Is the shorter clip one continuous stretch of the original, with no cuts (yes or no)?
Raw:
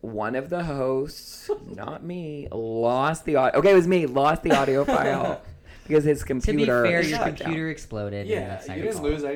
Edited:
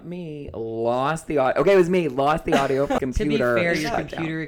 no